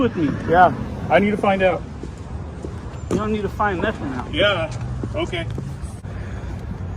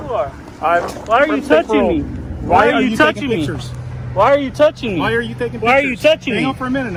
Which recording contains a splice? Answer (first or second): first